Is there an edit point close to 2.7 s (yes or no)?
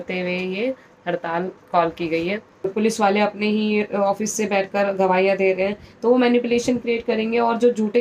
yes